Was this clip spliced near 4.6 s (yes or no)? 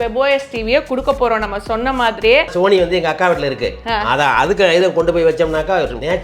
no